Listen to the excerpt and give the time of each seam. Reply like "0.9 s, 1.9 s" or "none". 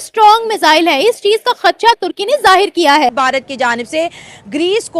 3.1 s